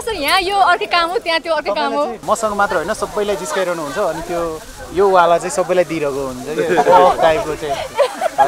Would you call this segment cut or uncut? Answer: cut